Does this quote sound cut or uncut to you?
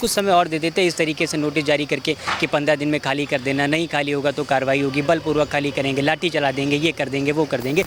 uncut